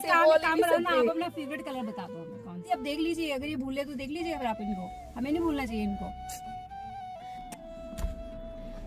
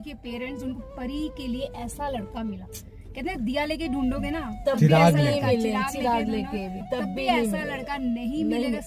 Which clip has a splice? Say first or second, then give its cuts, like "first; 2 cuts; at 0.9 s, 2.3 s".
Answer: first; 1 cut; at 2.7 s